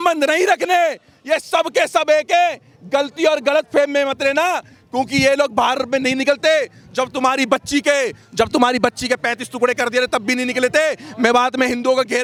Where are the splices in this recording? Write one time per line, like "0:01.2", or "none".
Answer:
none